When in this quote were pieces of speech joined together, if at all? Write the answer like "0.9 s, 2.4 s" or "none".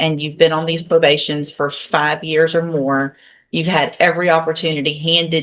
none